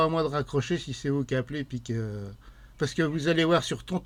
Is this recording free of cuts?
yes; 0 cuts

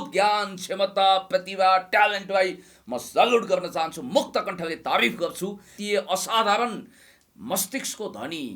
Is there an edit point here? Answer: yes; 1 cut; at 5.7 s

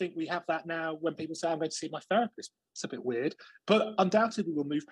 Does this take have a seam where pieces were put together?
no; 0 cuts

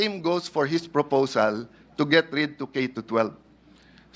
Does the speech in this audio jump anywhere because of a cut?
no; 0 cuts

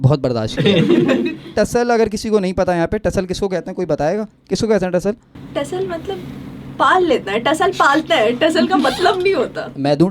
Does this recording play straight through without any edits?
no; 1 cut; at 1.5 s

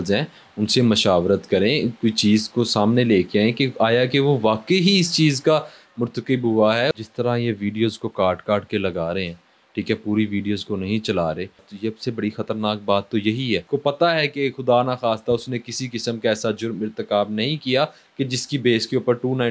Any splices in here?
yes; 3 cuts; at 6.9 s, 11.7 s, 13.6 s

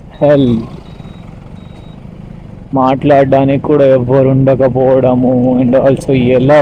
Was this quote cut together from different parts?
no; 0 cuts

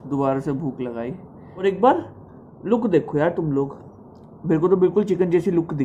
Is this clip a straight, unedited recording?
no; 1 cut; at 1.4 s

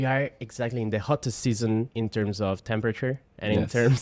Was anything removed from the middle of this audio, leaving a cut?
yes; 1 cut; at 1.9 s

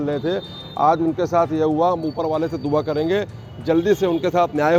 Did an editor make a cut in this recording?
no; 0 cuts

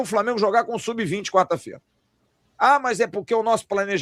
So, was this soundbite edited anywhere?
no; 0 cuts

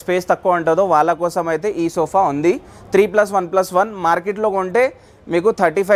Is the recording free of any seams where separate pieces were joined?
yes; 0 cuts

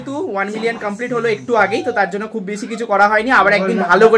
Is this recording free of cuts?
yes; 0 cuts

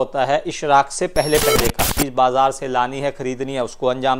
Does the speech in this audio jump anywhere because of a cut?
yes; 1 cut; at 2.0 s

